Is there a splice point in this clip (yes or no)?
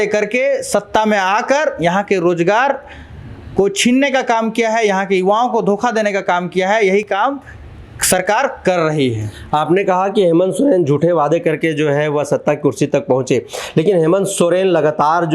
no